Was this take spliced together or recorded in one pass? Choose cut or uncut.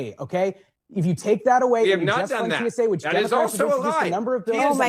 uncut